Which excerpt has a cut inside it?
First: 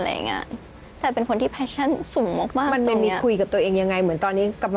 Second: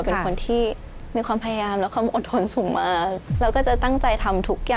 second; 1 cut; at 3.3 s

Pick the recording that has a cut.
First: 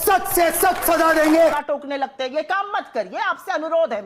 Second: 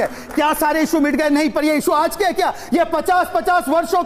first; 1 cut; at 1.5 s

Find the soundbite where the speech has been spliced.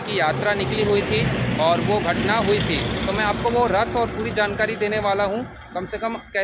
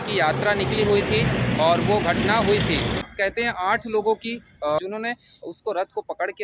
second; 2 cuts; at 3.0 s, 4.8 s

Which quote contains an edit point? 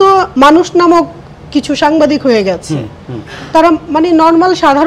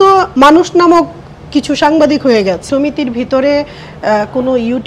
second; 1 cut; at 2.7 s

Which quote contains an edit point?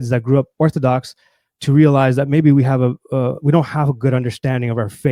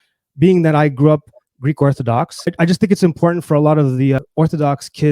second; 2 cuts; at 2.5 s, 4.2 s

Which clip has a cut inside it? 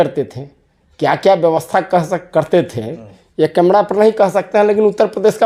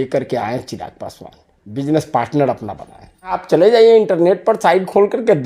second; 1 cut; at 3.4 s

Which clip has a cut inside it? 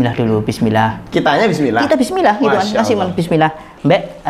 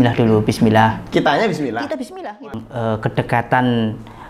second; 1 cut; at 2.5 s

